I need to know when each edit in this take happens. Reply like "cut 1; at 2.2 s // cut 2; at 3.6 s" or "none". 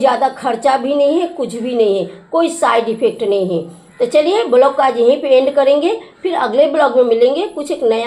none

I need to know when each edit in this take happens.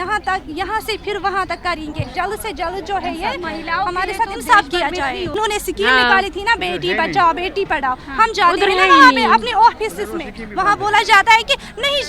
cut 1; at 2.1 s // cut 2; at 5.3 s

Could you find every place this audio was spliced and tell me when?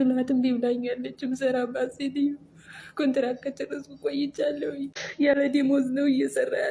cut 1; at 5.2 s

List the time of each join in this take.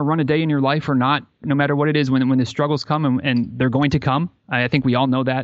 none

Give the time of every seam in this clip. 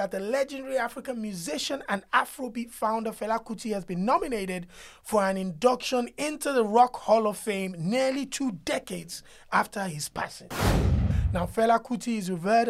cut 1; at 10.9 s

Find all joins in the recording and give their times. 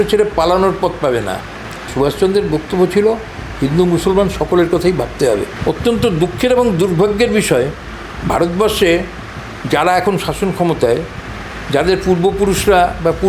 cut 1; at 1.8 s // cut 2; at 5.5 s

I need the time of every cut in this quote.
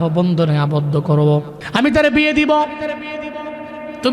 cut 1; at 1.6 s

